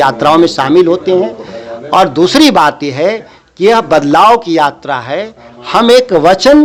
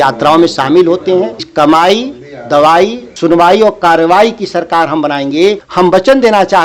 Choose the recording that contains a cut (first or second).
second